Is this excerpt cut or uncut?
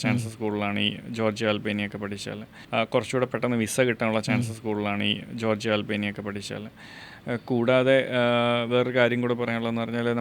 cut